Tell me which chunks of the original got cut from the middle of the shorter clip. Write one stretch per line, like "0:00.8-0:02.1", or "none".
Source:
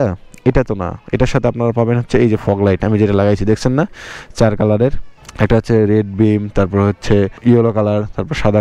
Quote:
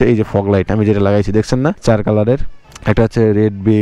0:03.9-0:04.3